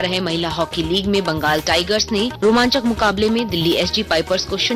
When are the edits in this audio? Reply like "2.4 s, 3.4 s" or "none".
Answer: 2.3 s